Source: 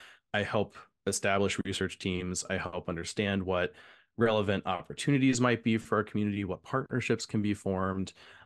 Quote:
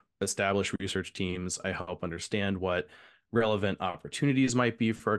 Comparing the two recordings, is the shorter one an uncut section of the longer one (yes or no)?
yes